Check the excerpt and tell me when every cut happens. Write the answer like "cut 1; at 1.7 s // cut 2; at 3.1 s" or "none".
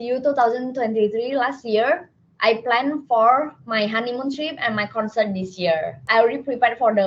cut 1; at 6.0 s